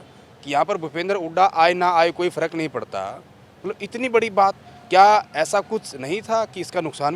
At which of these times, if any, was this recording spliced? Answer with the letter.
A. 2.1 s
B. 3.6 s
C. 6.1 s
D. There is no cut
D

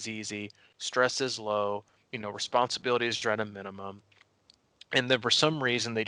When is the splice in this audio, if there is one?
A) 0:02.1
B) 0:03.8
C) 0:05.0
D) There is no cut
D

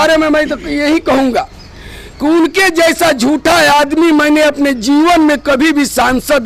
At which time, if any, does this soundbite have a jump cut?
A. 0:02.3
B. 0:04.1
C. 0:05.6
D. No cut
D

